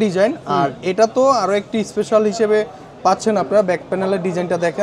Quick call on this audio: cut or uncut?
uncut